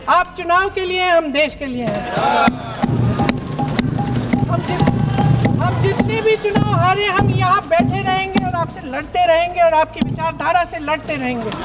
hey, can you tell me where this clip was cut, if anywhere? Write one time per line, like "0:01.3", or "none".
none

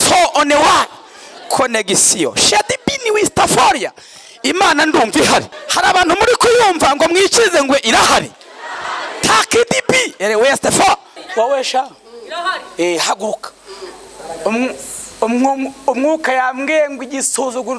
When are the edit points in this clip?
0:05.6
0:11.2

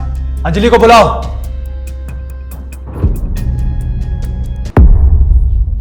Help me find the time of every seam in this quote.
0:04.7

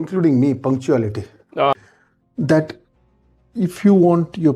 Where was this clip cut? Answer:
0:01.8

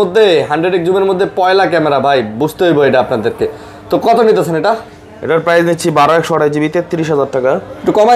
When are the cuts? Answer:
none

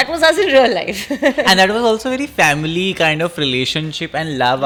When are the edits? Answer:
none

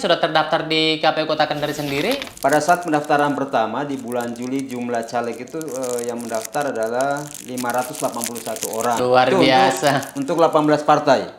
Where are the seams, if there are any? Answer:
0:02.3
0:09.0

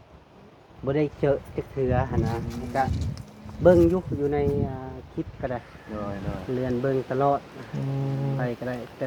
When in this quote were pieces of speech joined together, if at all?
none

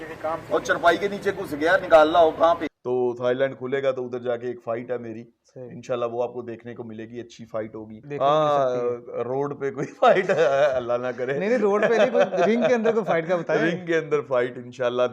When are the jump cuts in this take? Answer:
0:02.7
0:08.0

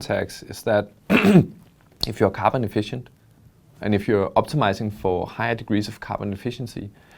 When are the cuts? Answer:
none

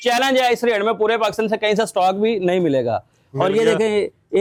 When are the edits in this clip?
none

